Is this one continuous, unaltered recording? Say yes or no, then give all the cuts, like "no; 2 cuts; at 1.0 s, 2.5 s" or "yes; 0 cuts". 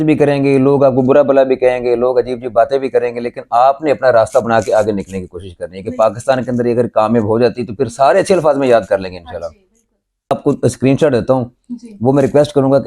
no; 1 cut; at 10.3 s